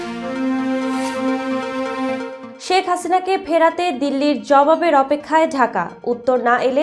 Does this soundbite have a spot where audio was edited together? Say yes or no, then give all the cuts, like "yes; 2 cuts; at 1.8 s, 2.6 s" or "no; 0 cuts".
yes; 1 cut; at 2.4 s